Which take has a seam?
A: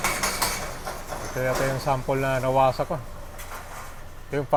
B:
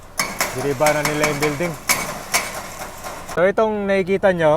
B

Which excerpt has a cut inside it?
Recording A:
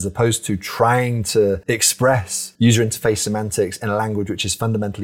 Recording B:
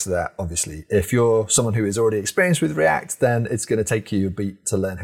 A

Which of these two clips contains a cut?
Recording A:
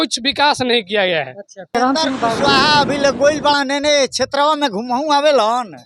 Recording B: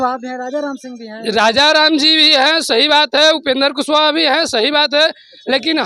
A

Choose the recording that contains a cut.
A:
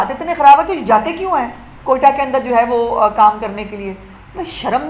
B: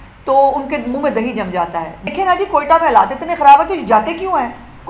B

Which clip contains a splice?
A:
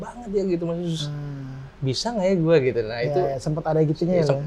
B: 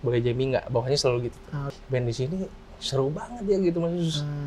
B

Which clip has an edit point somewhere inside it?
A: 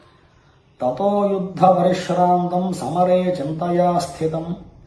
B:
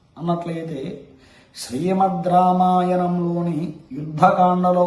A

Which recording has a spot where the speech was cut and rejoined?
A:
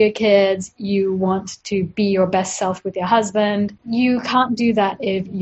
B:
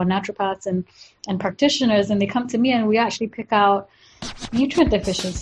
A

